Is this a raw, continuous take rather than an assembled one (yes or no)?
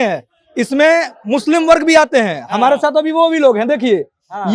yes